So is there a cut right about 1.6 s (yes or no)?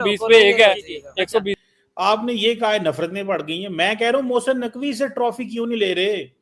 yes